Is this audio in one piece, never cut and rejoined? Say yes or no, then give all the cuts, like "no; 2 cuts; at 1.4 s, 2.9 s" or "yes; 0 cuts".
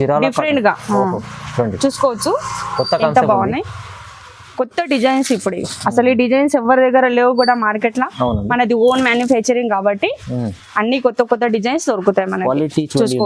yes; 0 cuts